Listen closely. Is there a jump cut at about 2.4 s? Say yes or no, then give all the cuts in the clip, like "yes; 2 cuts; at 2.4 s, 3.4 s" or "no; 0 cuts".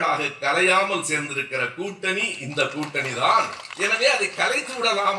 no; 1 cut; at 3.6 s